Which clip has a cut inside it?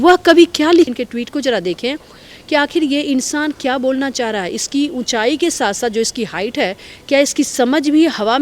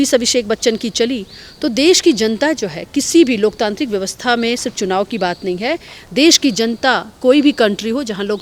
first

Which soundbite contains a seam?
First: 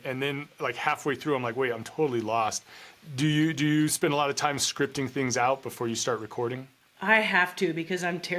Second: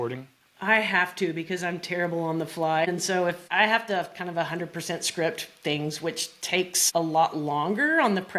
second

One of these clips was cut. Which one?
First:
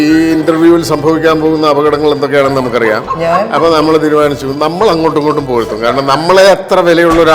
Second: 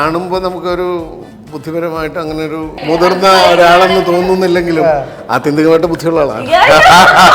second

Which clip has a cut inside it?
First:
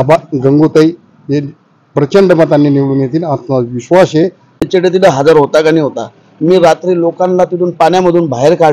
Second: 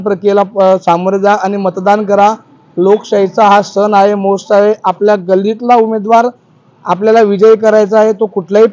first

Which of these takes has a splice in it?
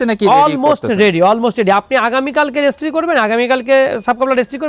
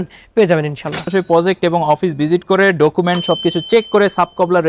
second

